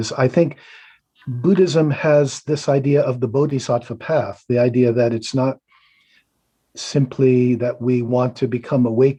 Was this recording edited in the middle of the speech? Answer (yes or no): no